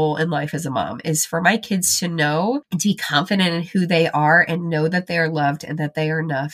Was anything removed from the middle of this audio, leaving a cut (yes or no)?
yes